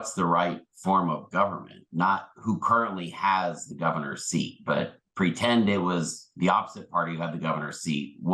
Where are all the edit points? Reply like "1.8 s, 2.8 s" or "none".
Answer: none